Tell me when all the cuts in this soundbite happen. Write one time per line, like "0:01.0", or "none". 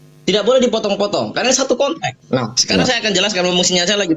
0:02.1